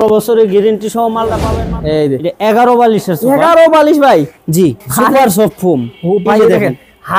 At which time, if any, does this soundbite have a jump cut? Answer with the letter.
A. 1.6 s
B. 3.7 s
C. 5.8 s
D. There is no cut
A